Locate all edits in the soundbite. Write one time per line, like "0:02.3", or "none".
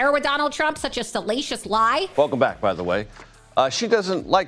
0:02.1